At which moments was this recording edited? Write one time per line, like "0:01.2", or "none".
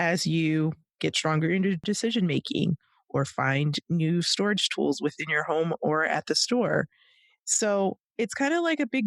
0:01.8